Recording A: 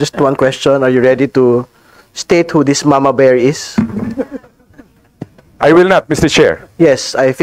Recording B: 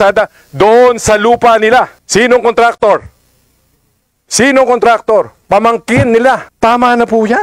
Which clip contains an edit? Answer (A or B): B